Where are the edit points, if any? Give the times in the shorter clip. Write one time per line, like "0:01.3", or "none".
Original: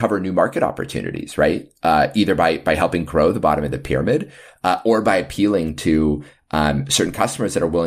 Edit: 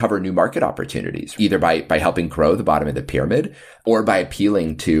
0:01.3
0:03.8